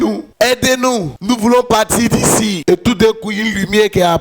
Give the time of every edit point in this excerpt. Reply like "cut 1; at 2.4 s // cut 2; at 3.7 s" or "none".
cut 1; at 1.1 s // cut 2; at 2.6 s